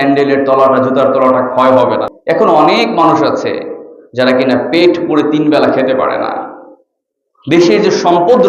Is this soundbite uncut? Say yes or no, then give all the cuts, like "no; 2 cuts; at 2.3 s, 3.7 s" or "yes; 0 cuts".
no; 1 cut; at 2.1 s